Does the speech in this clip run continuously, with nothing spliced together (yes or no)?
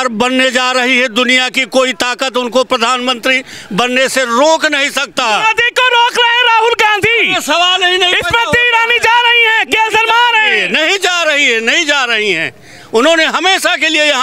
yes